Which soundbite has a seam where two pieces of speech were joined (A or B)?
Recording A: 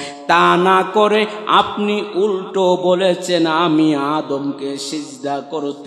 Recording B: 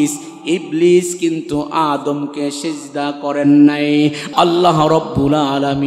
B